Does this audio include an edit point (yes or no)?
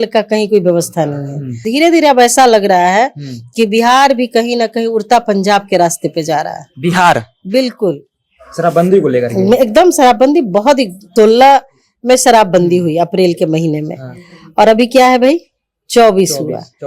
yes